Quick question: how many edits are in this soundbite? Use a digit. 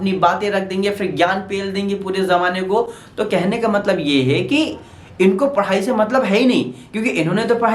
0